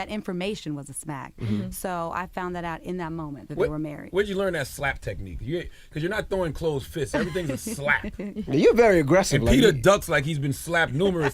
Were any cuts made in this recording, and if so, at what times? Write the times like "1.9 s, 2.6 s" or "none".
6.9 s